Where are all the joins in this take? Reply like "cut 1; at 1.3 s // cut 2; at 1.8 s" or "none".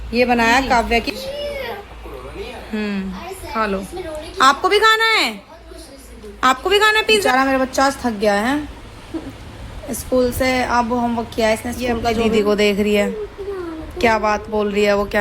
cut 1; at 1.1 s // cut 2; at 7.3 s // cut 3; at 12.3 s